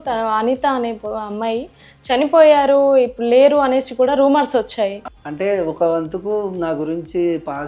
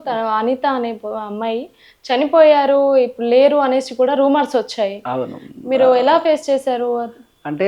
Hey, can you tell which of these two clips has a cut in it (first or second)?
first